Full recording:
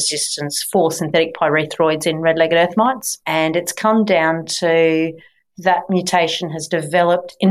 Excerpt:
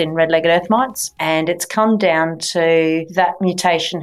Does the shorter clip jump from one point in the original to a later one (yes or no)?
yes